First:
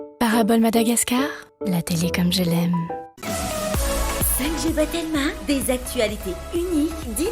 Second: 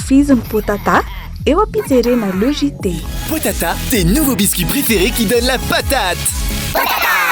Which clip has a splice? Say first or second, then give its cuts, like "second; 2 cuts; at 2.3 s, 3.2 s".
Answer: first; 1 cut; at 3.1 s